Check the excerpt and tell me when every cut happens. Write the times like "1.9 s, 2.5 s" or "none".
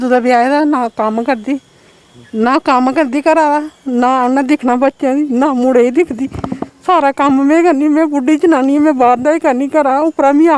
none

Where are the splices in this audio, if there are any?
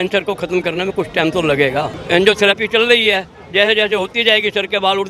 2.0 s

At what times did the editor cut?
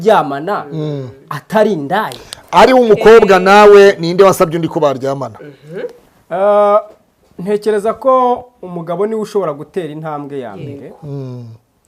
none

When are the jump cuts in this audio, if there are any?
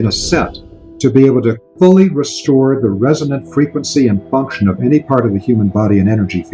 none

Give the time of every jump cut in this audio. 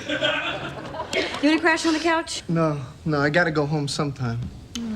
2.4 s

